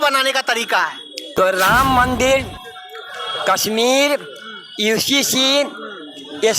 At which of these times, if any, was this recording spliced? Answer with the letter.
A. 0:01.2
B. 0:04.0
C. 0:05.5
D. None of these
A